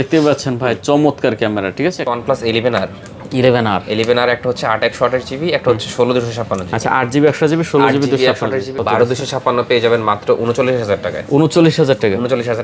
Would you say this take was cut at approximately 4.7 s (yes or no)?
no